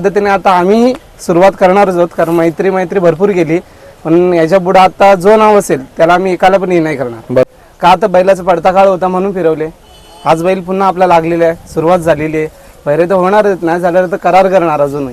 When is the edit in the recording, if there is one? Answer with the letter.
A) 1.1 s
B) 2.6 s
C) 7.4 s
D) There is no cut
C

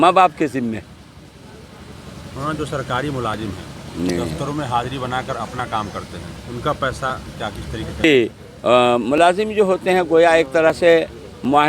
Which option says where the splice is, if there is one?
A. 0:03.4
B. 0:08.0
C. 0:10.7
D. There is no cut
B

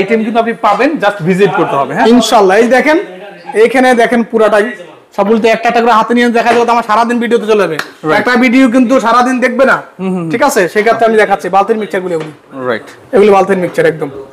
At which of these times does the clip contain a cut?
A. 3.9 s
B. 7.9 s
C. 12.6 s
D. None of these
D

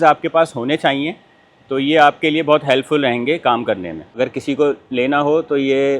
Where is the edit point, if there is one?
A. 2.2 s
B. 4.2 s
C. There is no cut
B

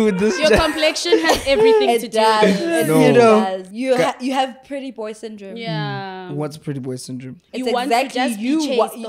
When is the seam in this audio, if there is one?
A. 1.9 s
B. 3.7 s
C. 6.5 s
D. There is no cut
B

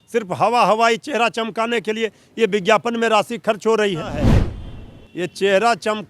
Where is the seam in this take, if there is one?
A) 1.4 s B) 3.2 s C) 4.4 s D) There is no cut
C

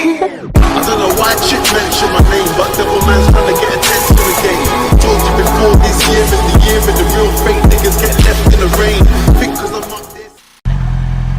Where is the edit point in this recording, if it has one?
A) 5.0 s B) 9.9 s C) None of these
A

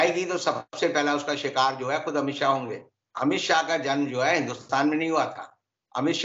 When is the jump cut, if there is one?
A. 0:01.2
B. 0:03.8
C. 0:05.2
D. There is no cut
D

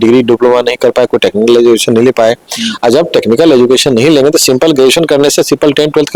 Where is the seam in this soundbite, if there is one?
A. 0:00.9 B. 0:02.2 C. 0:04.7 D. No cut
D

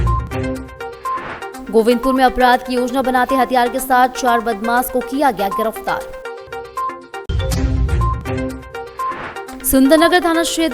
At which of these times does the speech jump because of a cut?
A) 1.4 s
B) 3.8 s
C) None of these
A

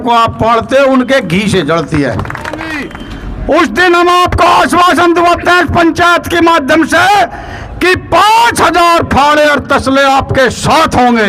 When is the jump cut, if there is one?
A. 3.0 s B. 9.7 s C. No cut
A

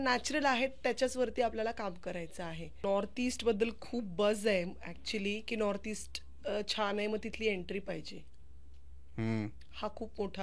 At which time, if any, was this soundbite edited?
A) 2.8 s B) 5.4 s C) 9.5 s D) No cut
A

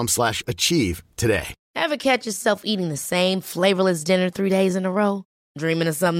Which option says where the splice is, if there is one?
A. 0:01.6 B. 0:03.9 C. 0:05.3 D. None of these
A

